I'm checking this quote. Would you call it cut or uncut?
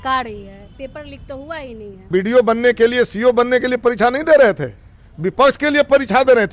cut